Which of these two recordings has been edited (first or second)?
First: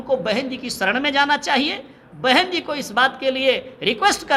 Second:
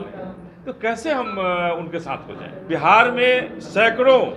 second